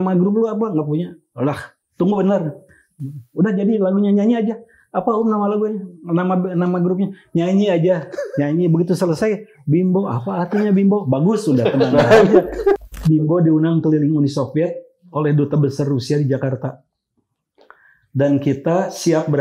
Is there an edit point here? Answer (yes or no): yes